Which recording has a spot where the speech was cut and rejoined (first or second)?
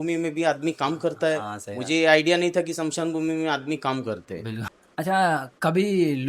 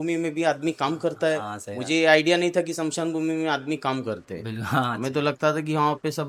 first